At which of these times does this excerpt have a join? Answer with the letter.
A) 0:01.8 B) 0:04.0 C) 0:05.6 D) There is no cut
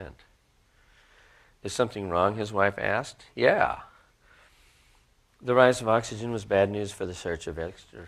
C